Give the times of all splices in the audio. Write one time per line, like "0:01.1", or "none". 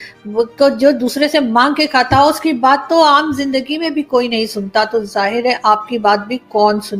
none